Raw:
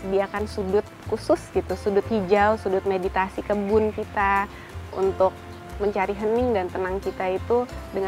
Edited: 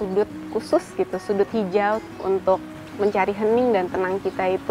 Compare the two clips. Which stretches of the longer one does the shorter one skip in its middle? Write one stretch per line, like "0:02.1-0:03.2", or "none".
0:03.1-0:05.4